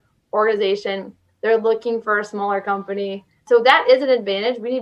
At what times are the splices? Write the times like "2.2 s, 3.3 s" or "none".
3.4 s